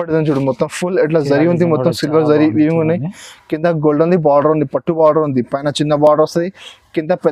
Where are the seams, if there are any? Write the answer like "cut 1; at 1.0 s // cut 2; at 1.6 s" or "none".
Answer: none

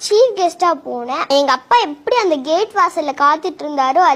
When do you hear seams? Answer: cut 1; at 1.2 s

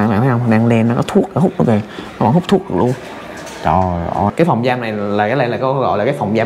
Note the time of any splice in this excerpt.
cut 1; at 4.3 s

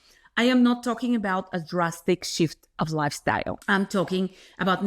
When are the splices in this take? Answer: cut 1; at 3.6 s

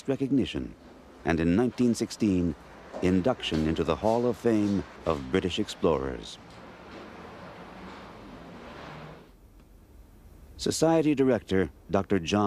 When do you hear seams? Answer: none

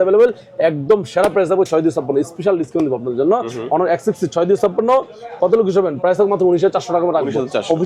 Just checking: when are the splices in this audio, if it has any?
none

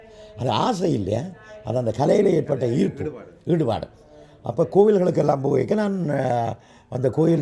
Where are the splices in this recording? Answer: none

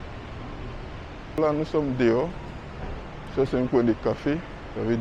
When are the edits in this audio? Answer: cut 1; at 1.4 s

